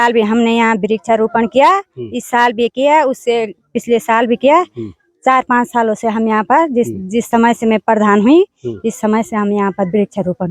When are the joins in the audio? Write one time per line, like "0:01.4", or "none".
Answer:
none